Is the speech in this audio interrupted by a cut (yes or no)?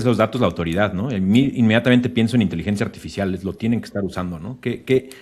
no